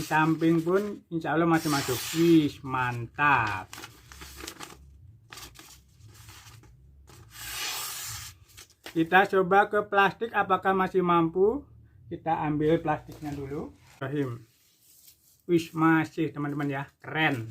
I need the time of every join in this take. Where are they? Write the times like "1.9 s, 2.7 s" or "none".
14.0 s